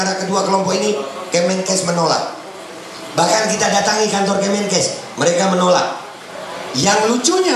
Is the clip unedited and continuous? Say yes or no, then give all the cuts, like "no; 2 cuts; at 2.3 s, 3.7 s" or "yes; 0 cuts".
yes; 0 cuts